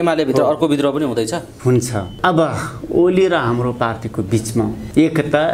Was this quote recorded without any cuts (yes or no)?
no